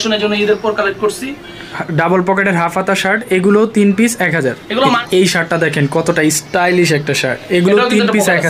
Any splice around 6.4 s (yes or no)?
no